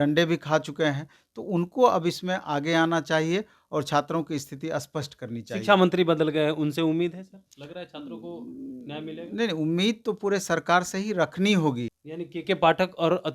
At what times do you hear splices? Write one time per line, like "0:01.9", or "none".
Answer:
0:12.0

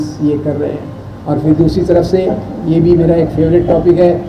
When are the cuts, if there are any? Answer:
none

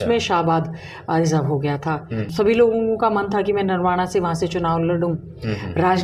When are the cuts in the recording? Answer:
0:02.3

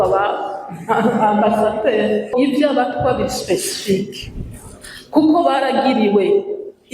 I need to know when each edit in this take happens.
0:02.3

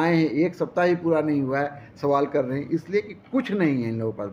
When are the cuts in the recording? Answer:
none

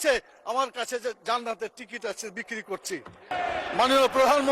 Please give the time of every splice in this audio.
0:03.3

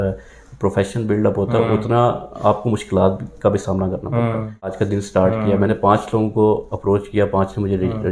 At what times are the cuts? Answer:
0:04.8

